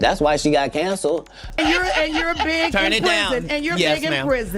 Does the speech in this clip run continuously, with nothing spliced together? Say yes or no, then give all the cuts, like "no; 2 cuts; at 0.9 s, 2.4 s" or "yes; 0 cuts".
no; 1 cut; at 1.4 s